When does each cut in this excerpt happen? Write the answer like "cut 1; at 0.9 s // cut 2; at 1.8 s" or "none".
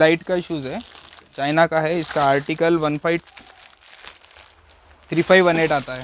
none

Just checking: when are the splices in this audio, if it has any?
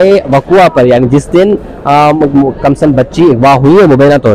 none

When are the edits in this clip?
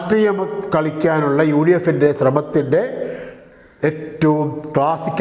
none

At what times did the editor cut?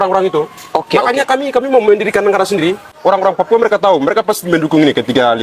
cut 1; at 3.0 s

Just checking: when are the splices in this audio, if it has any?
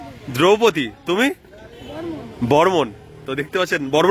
none

